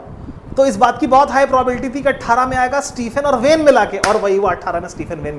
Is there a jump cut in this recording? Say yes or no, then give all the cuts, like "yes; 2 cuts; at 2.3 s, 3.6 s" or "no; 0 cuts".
no; 0 cuts